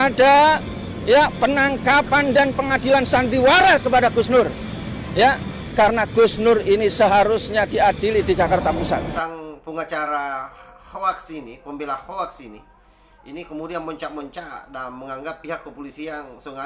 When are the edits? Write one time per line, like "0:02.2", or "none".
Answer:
0:09.2